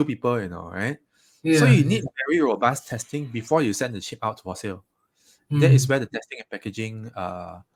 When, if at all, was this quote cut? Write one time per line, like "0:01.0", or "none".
none